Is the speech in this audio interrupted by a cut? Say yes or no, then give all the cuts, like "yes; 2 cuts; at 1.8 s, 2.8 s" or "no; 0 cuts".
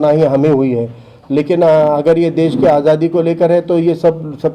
no; 0 cuts